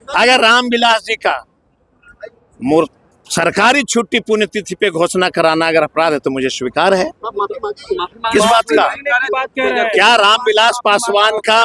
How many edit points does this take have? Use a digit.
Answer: 0